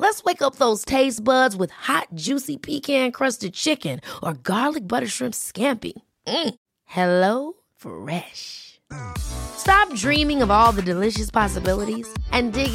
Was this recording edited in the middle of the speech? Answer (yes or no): no